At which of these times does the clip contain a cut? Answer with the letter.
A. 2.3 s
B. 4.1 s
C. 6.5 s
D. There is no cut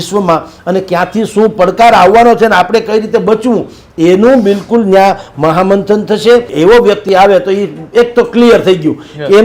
C